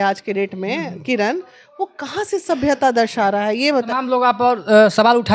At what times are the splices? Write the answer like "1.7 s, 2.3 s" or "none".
3.9 s